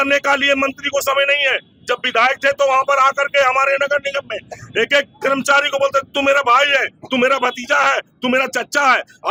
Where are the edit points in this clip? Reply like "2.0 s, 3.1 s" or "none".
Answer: none

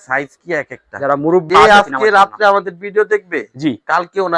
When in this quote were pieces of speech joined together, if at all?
1.5 s

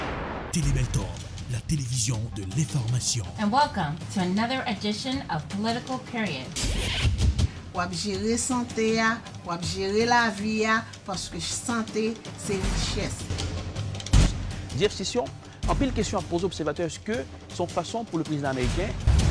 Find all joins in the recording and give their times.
5.6 s

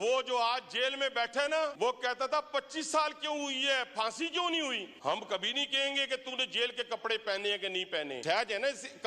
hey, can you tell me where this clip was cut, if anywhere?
1.7 s, 4.9 s, 8.2 s

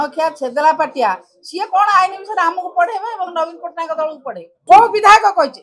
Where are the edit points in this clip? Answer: 4.5 s

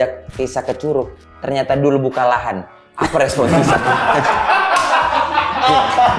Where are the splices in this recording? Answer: none

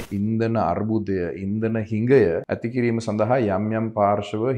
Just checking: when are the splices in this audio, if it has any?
2.5 s

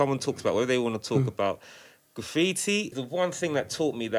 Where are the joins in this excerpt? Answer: 3.0 s

